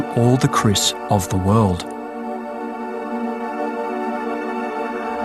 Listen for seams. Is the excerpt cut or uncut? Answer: cut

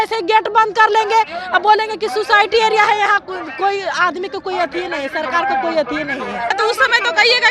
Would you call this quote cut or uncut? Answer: cut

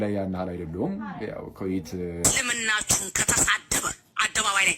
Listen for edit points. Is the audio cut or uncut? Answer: cut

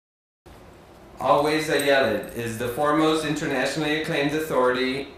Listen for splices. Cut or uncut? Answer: uncut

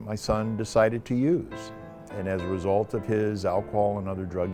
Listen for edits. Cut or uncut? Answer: uncut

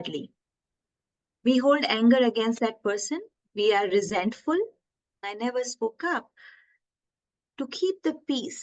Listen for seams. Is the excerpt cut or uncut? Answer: cut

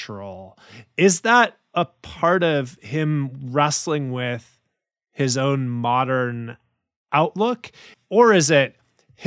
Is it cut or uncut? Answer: cut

